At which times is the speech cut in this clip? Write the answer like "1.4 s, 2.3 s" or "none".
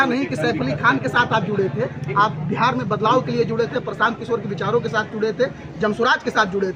none